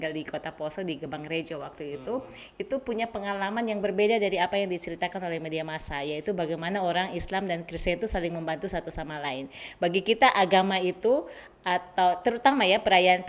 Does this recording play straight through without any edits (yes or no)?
yes